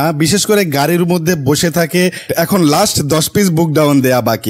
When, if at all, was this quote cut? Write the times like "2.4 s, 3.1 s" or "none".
2.3 s